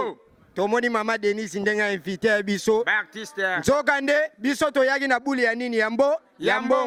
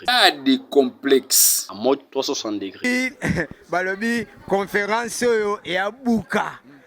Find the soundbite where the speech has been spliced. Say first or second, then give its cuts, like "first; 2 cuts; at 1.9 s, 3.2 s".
second; 1 cut; at 2.8 s